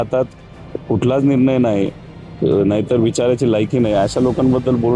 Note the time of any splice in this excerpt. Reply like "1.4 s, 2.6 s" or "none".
none